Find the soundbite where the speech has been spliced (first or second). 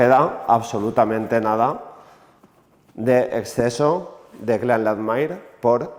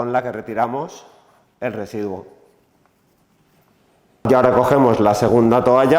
second